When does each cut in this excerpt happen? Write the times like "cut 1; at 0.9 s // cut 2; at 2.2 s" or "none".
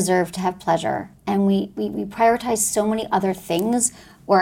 cut 1; at 1.1 s